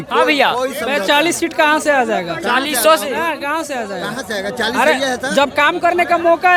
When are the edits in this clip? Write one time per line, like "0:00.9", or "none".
none